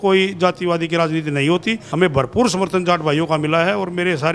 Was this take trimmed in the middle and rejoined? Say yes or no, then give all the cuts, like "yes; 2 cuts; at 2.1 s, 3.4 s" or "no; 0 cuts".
yes; 1 cut; at 1.8 s